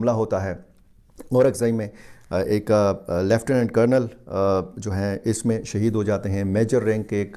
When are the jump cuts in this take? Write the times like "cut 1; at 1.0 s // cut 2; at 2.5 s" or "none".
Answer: none